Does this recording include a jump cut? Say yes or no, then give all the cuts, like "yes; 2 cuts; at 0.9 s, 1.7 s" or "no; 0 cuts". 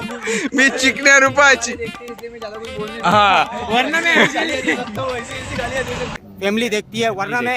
yes; 1 cut; at 6.1 s